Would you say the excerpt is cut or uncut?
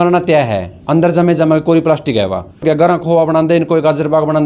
cut